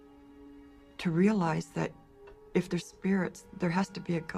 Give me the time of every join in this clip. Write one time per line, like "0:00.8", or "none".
none

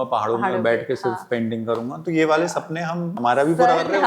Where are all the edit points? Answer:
0:03.1

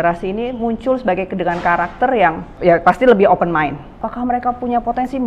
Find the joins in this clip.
0:02.5
0:04.0

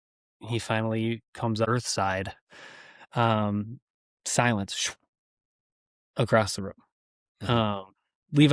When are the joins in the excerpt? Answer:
0:01.7

